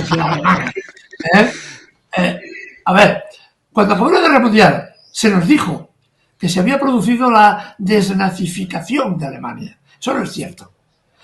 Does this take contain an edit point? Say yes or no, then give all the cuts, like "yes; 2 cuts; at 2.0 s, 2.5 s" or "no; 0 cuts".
no; 0 cuts